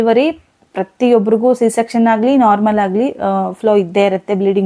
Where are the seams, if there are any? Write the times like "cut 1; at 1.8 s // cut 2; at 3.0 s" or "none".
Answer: none